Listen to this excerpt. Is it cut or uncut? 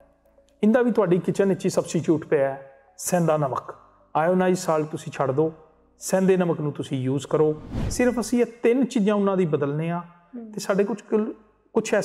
cut